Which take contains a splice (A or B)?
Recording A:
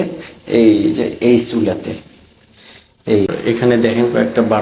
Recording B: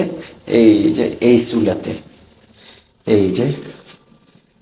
A